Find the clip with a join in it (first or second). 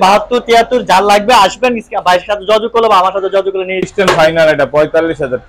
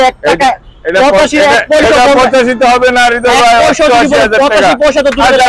first